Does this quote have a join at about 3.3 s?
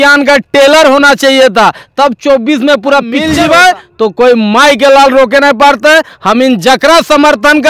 yes; 1 cut; at 3.3 s

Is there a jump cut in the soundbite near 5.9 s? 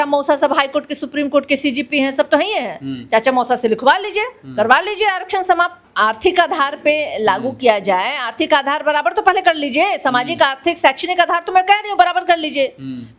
yes; 1 cut; at 5.9 s

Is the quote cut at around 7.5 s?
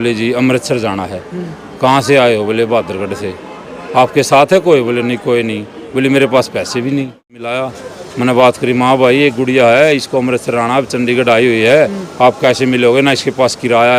yes; 1 cut; at 7.5 s

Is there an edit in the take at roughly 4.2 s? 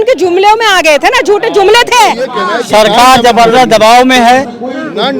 no; 1 cut; at 2.4 s

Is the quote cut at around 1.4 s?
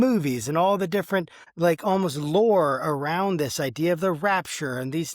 yes; 1 cut; at 1.4 s

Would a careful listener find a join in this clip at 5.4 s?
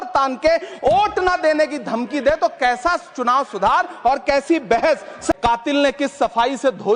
yes; 1 cut; at 5.4 s

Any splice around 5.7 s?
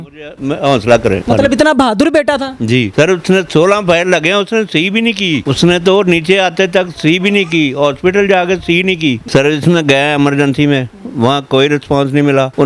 no; 1 cut; at 9.2 s

